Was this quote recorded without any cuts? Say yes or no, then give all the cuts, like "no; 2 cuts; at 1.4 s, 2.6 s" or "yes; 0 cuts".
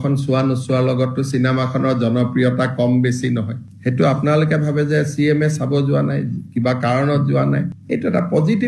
no; 1 cut; at 3.7 s